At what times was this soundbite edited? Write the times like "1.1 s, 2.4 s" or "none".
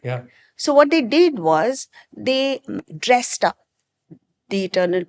2.9 s